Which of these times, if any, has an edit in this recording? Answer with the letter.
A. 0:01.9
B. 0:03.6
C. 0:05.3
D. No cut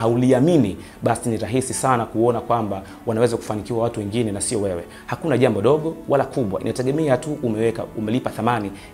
D